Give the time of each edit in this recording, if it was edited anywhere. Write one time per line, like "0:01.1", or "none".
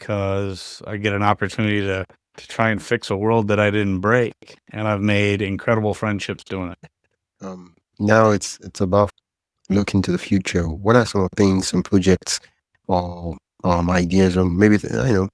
none